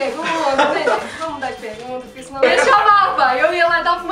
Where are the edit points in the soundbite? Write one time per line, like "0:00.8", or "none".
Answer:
0:02.4